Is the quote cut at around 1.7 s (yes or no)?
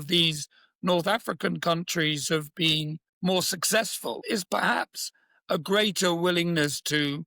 no